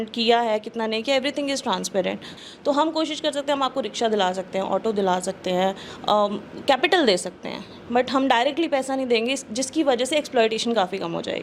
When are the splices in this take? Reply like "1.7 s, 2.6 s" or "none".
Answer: 2.3 s